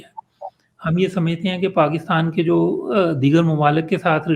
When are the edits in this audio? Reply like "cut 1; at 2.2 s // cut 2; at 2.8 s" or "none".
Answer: none